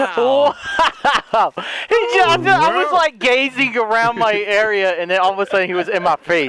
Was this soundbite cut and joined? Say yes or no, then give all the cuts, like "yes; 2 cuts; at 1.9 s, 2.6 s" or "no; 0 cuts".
no; 0 cuts